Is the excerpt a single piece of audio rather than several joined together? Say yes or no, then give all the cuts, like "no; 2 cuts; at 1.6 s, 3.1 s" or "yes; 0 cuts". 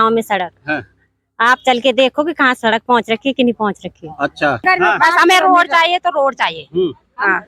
yes; 0 cuts